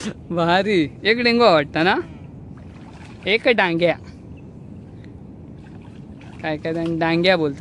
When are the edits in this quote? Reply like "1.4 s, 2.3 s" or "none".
none